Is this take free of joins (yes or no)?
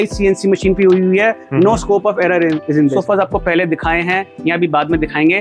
no